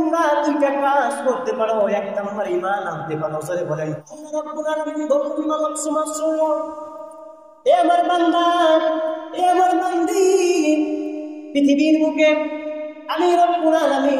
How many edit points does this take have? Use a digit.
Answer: 1